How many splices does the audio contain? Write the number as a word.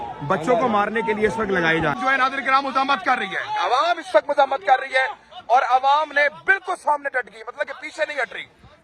one